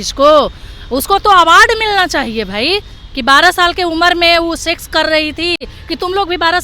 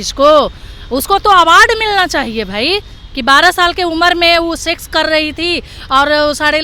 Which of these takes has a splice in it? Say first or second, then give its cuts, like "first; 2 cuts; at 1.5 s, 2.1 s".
first; 1 cut; at 5.7 s